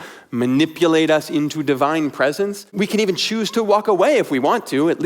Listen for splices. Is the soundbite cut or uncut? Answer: cut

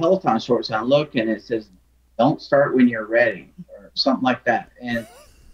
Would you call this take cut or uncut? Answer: uncut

